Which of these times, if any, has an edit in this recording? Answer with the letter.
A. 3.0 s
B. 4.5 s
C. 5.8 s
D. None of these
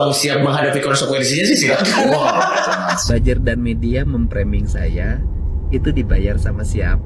A